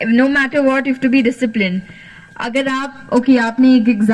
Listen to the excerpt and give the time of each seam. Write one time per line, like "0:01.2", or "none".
none